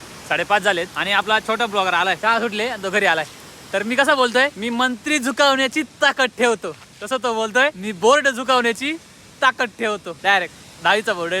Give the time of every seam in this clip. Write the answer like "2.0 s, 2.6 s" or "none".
1.0 s, 2.2 s, 4.6 s, 7.9 s, 10.1 s